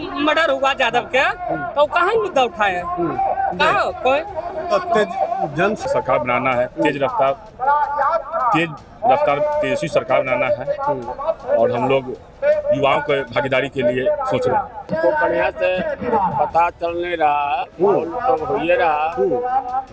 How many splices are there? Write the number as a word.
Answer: two